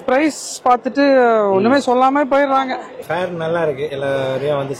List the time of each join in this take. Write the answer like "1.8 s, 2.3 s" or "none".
3.0 s